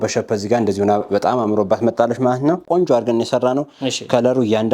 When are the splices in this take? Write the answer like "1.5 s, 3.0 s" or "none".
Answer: 2.6 s